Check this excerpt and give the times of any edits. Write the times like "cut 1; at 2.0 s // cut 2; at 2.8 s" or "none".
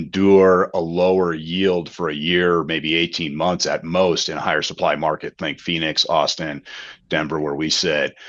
none